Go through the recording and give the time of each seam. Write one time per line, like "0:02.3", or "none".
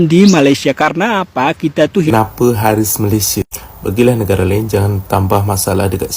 0:02.1